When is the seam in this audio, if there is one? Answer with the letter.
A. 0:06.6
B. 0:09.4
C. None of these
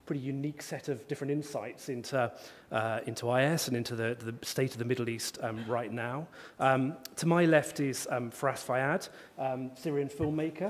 A